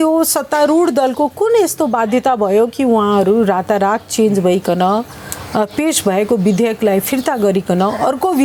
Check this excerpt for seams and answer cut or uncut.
uncut